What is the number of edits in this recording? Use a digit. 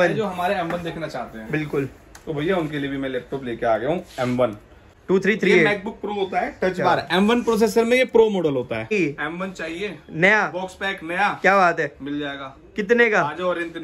2